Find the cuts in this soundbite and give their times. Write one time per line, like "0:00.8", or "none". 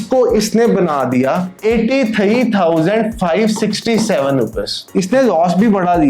0:04.8